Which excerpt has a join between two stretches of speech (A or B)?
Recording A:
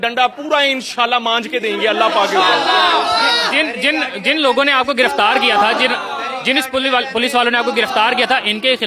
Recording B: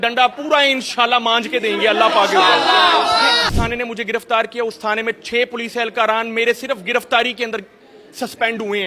B